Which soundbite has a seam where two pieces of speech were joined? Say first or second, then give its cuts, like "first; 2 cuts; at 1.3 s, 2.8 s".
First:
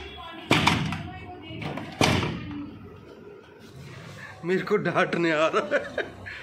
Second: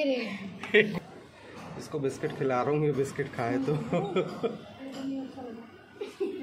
second; 1 cut; at 0.9 s